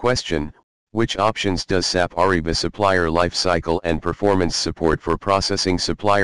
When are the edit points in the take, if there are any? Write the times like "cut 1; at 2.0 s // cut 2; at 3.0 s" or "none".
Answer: cut 1; at 1.1 s